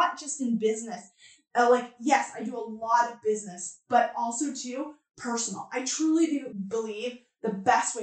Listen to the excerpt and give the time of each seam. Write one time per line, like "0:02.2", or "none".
0:06.5